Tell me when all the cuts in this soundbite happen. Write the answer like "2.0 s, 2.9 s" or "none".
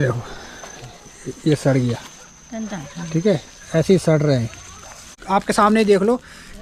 5.1 s

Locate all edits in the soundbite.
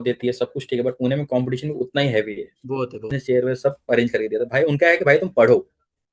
3.2 s

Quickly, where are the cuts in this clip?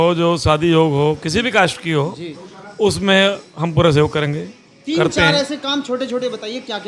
none

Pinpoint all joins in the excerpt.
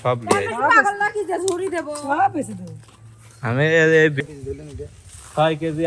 4.3 s

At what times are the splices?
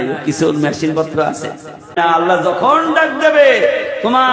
2.0 s

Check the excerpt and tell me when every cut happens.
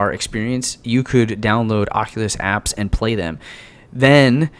none

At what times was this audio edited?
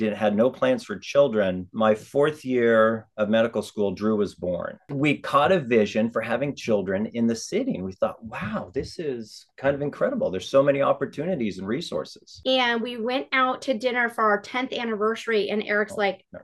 1.7 s, 4.8 s, 12.2 s

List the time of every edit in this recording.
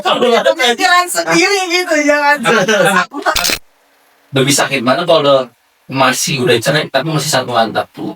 3.4 s

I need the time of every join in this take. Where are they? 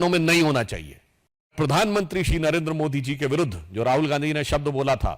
1.5 s

